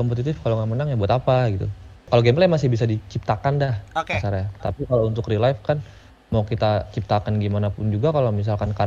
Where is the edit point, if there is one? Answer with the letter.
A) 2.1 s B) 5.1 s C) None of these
A